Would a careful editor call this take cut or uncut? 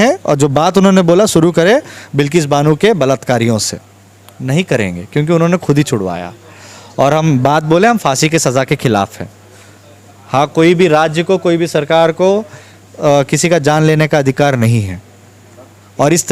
uncut